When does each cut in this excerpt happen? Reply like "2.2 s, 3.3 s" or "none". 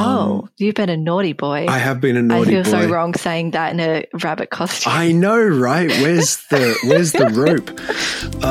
none